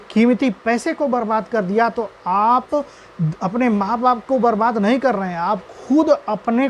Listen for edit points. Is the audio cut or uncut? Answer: uncut